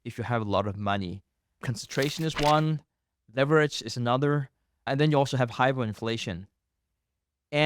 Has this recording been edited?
yes; 2 cuts; at 1.6 s, 4.9 s

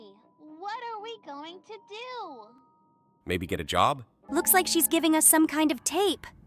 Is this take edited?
yes; 1 cut; at 4.1 s

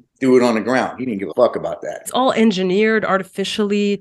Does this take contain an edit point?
yes; 2 cuts; at 1.3 s, 2.0 s

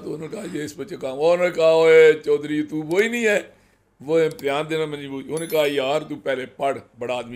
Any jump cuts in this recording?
no; 0 cuts

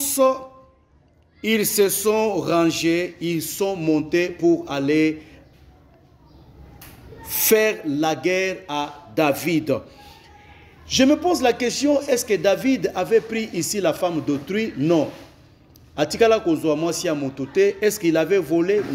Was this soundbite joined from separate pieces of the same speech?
no; 0 cuts

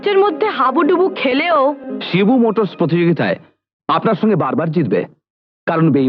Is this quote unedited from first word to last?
yes; 0 cuts

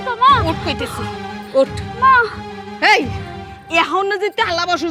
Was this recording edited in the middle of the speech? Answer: no; 0 cuts

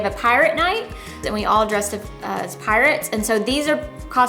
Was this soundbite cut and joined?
yes; 1 cut; at 1.2 s

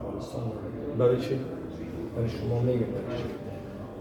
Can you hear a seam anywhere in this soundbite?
no; 0 cuts

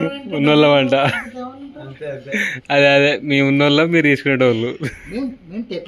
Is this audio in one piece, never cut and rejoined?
yes; 0 cuts

